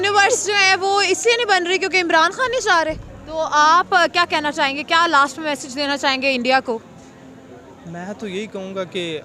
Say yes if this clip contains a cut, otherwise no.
yes